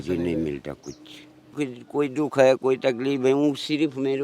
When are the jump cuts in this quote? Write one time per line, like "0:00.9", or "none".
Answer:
0:01.5